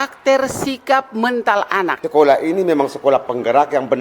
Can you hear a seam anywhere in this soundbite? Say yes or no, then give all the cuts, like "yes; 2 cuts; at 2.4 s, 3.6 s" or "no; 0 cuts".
yes; 1 cut; at 2.0 s